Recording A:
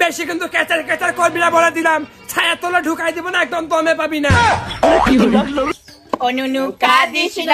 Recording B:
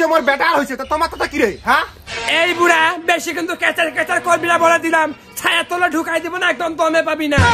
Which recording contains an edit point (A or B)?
A